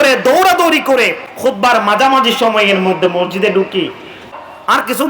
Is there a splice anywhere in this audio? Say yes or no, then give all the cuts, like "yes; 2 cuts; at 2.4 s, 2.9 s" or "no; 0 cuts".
yes; 2 cuts; at 1.2 s, 4.2 s